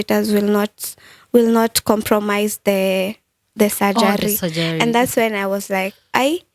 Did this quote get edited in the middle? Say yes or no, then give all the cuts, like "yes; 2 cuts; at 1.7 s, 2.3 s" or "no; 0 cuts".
no; 0 cuts